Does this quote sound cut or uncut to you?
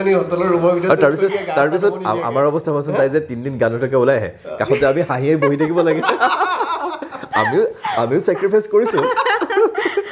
uncut